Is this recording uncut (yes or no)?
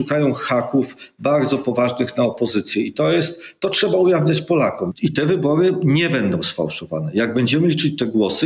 no